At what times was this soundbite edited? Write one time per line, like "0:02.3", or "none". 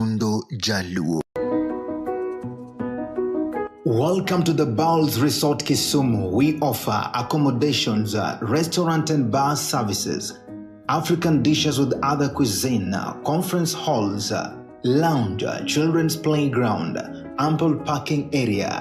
0:01.2